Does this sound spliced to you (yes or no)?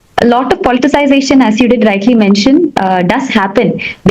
no